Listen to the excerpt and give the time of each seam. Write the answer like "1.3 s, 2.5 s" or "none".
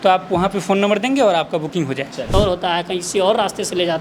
2.3 s